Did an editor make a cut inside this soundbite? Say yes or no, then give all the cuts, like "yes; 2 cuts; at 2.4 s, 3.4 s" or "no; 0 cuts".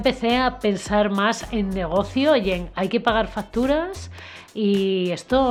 no; 0 cuts